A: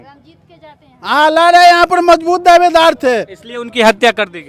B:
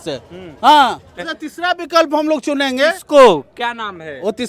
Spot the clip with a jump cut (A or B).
B